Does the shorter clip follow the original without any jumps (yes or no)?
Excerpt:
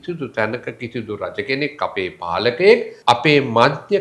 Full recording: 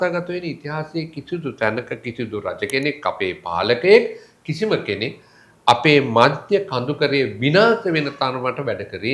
no